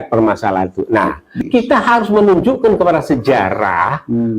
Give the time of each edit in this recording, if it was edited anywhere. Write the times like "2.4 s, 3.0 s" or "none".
1.3 s